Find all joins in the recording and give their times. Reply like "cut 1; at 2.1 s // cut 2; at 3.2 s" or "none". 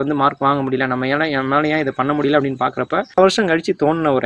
cut 1; at 3.2 s